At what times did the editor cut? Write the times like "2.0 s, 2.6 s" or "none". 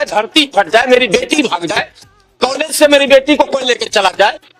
none